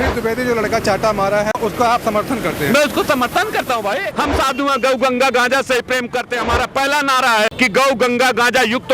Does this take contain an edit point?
yes; 3 cuts; at 1.6 s, 4.1 s, 7.5 s

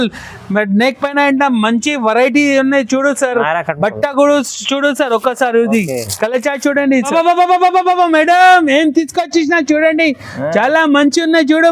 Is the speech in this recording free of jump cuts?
no; 1 cut; at 7.1 s

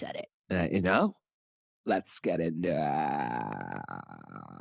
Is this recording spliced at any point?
no; 0 cuts

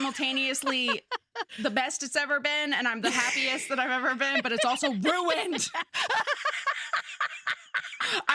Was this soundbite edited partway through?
yes; 1 cut; at 1.5 s

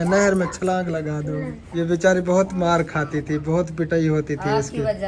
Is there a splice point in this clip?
yes; 1 cut; at 1.6 s

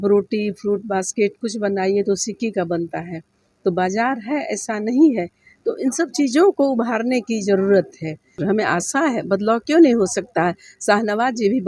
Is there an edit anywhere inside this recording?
yes; 1 cut; at 8.4 s

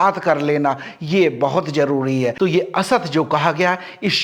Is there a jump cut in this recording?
yes; 1 cut; at 2.3 s

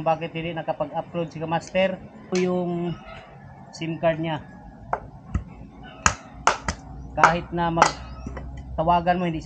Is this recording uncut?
no; 1 cut; at 2.3 s

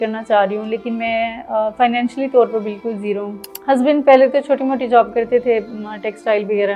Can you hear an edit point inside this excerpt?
yes; 1 cut; at 3.4 s

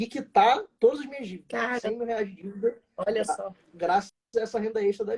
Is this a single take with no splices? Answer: yes; 0 cuts

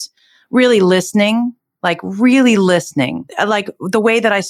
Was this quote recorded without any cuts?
no; 1 cut; at 3.2 s

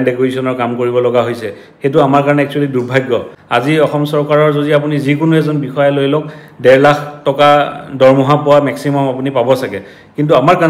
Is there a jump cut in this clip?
yes; 1 cut; at 3.4 s

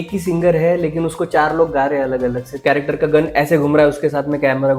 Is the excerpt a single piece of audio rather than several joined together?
no; 1 cut; at 2.6 s

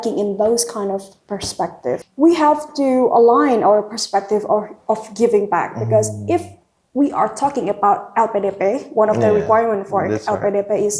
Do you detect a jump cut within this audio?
yes; 1 cut; at 2.1 s

